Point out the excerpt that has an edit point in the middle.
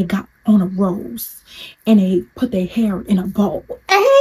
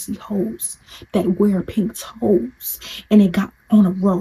first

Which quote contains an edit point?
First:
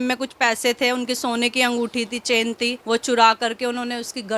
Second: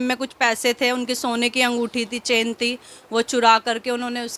first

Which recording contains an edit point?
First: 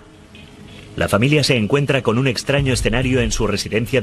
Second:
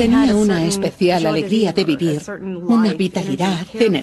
second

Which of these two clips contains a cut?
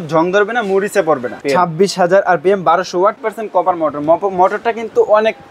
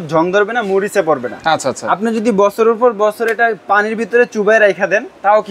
first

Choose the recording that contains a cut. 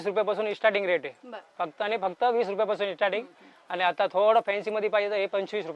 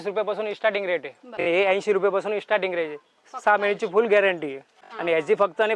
second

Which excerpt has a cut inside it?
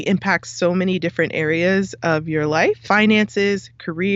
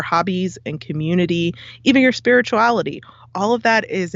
first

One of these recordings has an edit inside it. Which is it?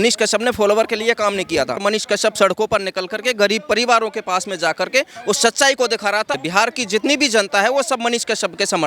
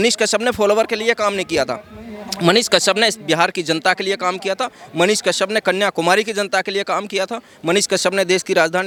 first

